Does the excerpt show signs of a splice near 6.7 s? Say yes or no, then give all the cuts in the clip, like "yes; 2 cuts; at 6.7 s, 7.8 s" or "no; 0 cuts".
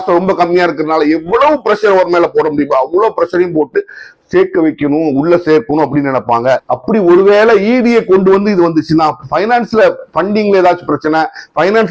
yes; 1 cut; at 6.7 s